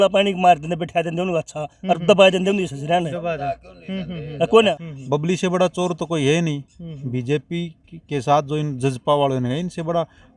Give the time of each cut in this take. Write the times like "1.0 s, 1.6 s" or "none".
4.9 s